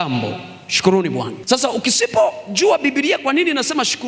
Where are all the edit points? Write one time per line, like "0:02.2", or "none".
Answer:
0:01.3